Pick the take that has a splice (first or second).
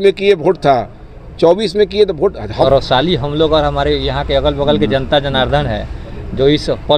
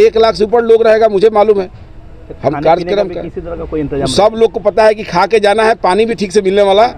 first